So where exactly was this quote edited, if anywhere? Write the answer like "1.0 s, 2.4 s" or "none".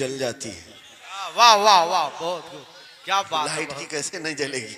none